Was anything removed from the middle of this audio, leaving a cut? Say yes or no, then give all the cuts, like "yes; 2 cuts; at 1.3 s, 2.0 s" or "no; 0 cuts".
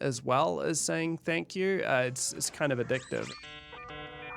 yes; 1 cut; at 3.4 s